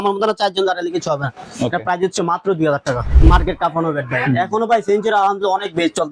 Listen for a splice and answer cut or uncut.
cut